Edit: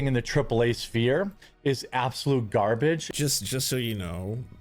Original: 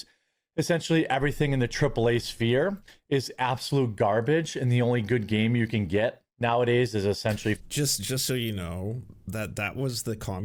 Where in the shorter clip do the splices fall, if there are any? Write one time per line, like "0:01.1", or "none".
0:03.1

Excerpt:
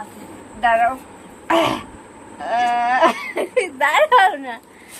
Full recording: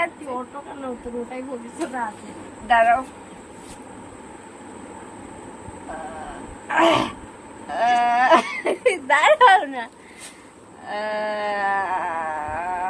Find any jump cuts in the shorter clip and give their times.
0:01.5

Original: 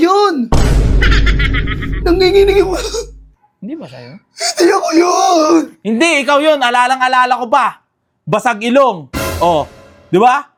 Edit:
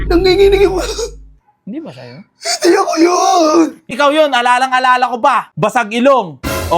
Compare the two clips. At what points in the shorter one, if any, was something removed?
0:03.9
0:05.5

